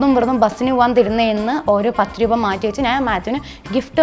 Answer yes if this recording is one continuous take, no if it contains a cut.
yes